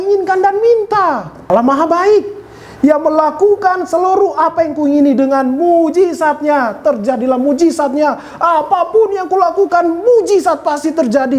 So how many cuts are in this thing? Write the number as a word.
one